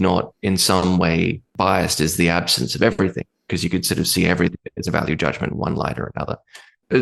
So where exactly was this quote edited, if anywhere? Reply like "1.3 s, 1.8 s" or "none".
1.5 s